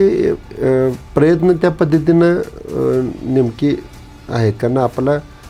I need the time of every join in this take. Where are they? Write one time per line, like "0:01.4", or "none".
none